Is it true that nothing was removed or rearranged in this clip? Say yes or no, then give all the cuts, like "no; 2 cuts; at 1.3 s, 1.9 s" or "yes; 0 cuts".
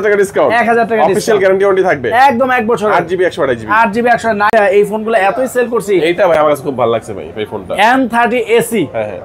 no; 1 cut; at 4.5 s